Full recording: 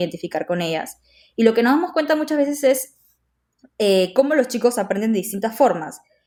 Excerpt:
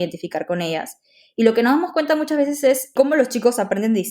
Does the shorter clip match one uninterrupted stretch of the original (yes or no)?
no